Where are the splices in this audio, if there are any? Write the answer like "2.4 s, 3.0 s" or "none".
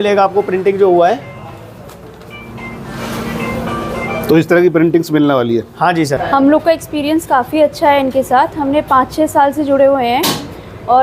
6.2 s